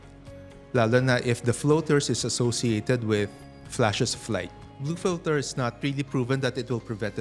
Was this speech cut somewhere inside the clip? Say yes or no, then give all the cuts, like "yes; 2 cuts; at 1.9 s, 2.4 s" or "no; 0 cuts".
yes; 2 cuts; at 4.8 s, 5.8 s